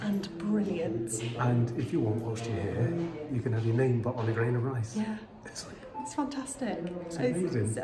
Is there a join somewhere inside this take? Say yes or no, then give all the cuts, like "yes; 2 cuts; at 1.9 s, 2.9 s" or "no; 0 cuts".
no; 0 cuts